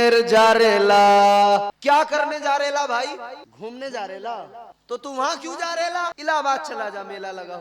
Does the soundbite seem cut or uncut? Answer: cut